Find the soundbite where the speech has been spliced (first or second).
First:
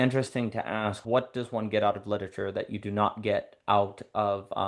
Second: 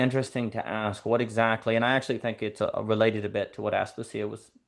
first